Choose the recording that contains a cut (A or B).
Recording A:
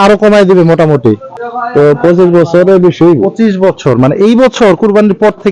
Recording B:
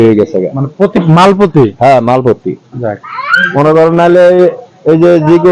A